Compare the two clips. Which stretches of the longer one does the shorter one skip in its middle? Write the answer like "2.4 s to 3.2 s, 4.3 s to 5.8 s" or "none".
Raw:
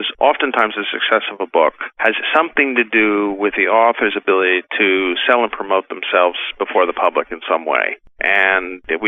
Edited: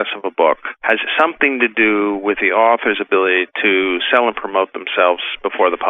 none